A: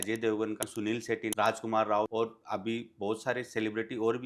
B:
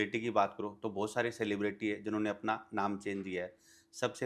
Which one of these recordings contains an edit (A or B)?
A